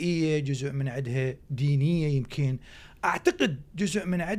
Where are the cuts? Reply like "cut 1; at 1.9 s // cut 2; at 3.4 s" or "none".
none